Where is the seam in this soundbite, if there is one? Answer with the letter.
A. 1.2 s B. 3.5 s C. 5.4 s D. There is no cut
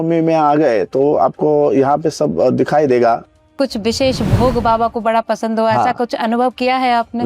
B